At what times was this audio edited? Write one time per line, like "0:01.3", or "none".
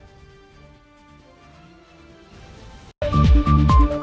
0:02.9